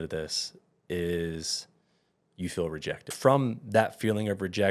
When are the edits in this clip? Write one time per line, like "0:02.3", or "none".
0:03.1